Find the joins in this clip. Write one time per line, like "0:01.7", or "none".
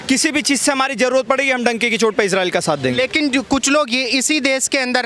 none